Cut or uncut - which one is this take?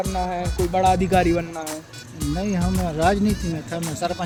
uncut